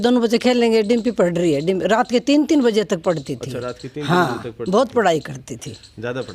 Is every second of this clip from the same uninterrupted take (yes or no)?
yes